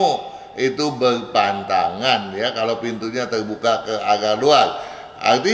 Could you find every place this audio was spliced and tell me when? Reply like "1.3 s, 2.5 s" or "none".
none